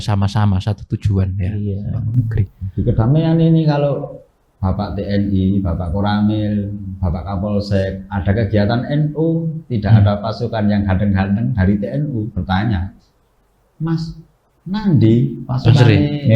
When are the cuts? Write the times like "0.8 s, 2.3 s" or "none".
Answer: none